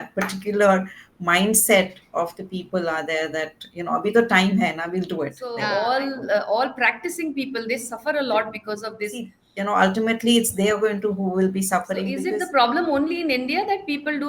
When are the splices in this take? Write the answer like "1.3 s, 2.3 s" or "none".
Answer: 5.5 s, 9.4 s, 12.1 s